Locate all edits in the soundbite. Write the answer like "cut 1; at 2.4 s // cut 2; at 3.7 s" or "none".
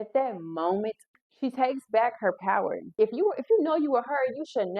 cut 1; at 1.1 s // cut 2; at 2.9 s